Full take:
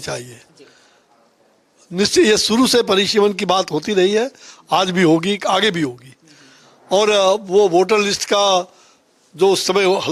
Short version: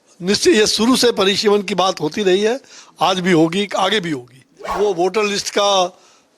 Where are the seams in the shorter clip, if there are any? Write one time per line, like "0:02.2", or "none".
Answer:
0:04.7

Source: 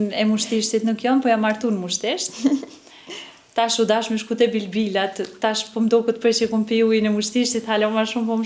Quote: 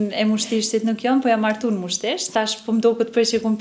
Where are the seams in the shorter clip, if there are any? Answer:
0:02.2

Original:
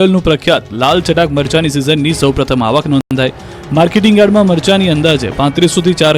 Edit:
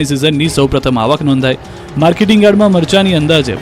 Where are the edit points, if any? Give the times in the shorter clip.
0:01.4

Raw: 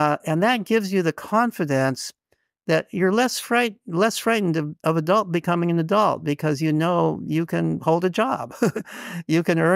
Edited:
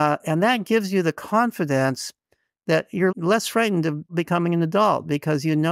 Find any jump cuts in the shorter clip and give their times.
0:03.1
0:04.1

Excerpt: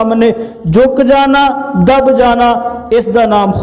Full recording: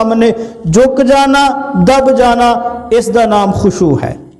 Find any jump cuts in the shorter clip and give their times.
none

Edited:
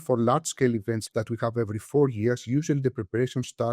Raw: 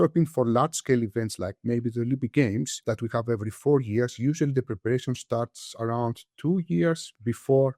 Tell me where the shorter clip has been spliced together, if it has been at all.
0:01.0

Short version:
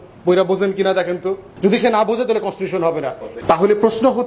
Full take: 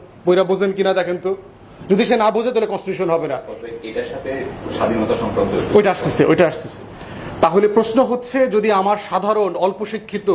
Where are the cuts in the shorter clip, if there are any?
0:01.4
0:03.3

